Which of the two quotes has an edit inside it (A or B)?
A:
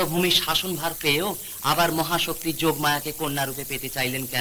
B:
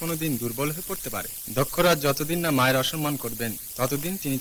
B